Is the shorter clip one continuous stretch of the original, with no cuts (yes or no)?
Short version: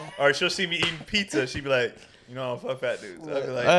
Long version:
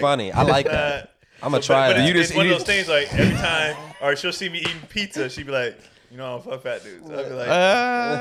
yes